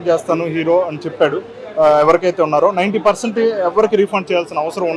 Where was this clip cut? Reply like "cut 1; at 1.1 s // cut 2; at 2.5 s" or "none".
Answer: none